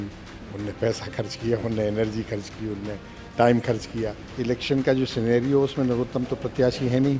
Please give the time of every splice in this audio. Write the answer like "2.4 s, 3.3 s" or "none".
4.2 s